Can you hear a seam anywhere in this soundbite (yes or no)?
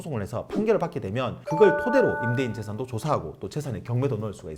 no